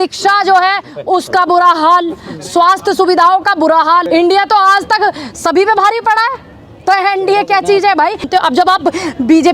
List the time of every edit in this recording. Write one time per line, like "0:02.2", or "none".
0:04.1
0:08.3